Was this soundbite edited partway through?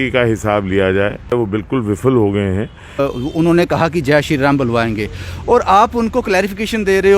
yes; 2 cuts; at 1.3 s, 3.0 s

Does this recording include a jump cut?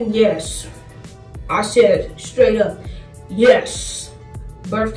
no; 0 cuts

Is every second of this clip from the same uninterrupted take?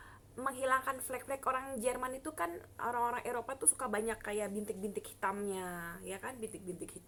yes; 0 cuts

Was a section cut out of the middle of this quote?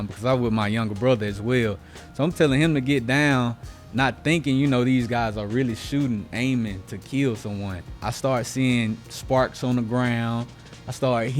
yes; 1 cut; at 7.9 s

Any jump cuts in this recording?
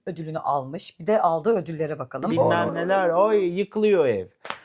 yes; 1 cut; at 2.5 s

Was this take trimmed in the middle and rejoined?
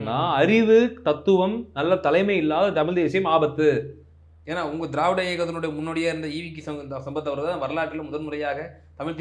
no; 0 cuts

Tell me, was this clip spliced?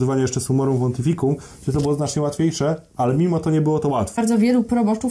yes; 1 cut; at 4.2 s

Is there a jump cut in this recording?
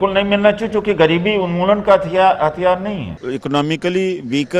yes; 1 cut; at 3.3 s

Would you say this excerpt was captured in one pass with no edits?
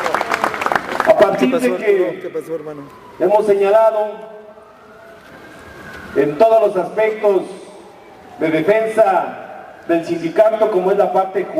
no; 1 cut; at 1.8 s

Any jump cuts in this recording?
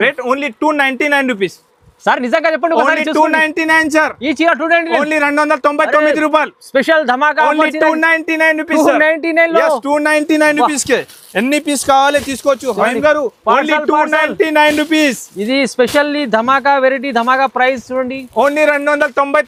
no; 0 cuts

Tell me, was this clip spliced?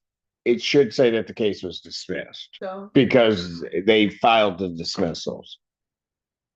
yes; 1 cut; at 2.4 s

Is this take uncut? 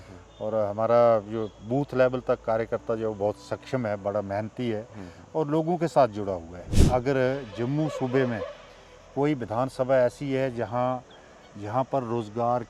no; 1 cut; at 6.8 s

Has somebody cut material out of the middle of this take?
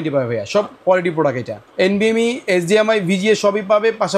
yes; 1 cut; at 1.6 s

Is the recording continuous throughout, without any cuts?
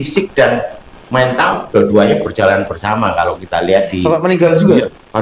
yes; 0 cuts

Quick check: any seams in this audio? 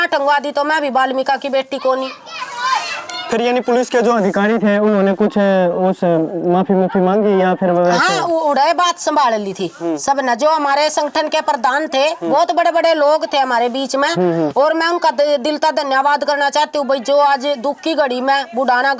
no; 0 cuts

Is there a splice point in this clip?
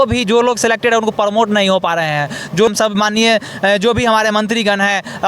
yes; 1 cut; at 2.7 s

